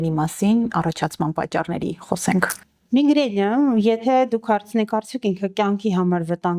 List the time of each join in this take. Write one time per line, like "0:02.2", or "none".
none